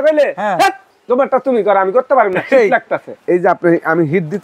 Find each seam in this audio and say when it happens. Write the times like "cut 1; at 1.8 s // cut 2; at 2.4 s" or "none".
cut 1; at 0.9 s // cut 2; at 3.1 s